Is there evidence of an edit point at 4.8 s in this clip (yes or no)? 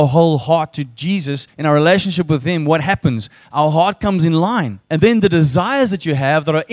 yes